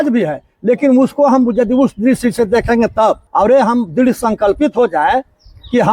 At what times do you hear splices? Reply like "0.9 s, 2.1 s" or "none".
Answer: 3.2 s